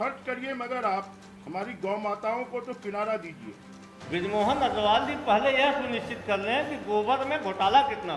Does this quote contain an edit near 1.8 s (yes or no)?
no